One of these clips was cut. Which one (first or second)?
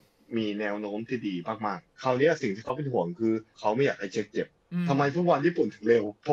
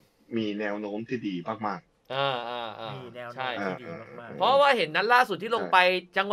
first